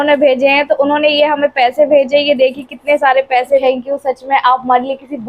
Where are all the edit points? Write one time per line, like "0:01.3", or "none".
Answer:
0:03.6